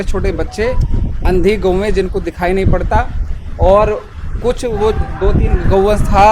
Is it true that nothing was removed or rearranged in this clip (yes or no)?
yes